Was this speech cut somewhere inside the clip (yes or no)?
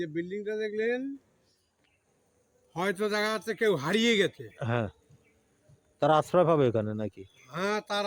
no